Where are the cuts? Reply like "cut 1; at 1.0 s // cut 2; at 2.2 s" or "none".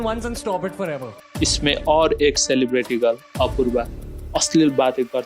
cut 1; at 1.2 s